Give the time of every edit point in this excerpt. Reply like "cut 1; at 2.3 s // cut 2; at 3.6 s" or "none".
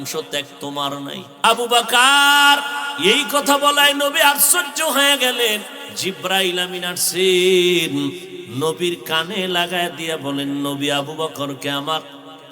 cut 1; at 1.3 s // cut 2; at 2.8 s // cut 3; at 5.8 s // cut 4; at 8.4 s